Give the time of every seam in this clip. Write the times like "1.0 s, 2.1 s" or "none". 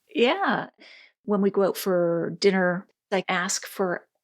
1.1 s, 2.9 s